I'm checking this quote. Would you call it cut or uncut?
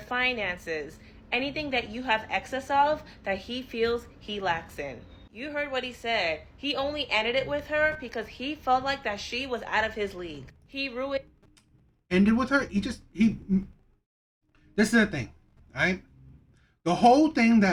uncut